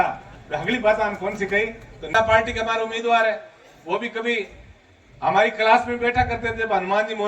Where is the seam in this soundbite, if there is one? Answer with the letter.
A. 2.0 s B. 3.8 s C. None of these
A